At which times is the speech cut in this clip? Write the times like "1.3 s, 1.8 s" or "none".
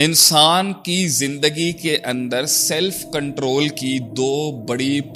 none